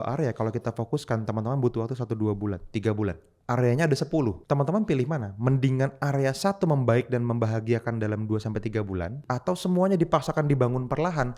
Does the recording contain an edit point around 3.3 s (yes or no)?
yes